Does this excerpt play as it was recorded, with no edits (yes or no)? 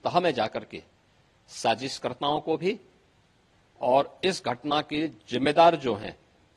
yes